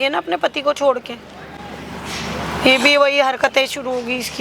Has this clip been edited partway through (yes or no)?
no